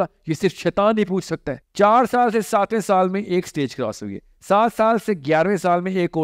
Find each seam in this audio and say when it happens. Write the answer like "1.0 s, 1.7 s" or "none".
1.6 s